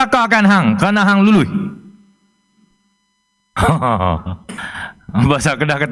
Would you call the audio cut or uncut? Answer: uncut